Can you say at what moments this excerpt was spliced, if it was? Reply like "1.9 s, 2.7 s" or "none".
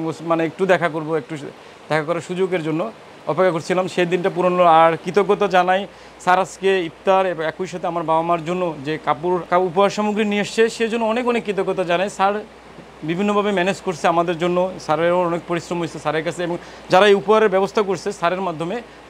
none